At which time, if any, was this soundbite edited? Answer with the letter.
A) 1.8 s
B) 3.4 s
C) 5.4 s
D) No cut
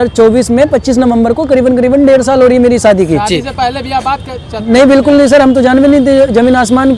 D